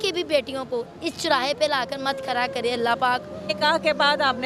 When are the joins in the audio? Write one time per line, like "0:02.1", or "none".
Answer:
0:03.4